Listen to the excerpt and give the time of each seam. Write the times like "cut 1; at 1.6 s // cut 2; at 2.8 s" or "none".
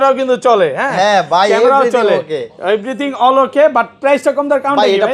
none